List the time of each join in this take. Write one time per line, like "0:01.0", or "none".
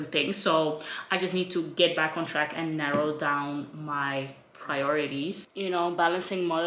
0:05.5